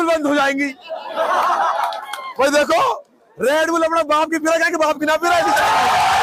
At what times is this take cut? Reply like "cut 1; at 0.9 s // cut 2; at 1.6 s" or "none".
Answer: none